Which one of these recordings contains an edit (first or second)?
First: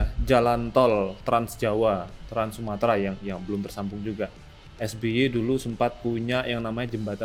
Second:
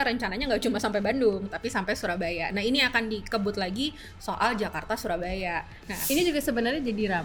second